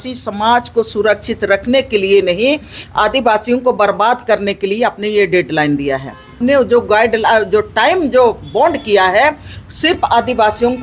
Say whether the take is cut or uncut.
cut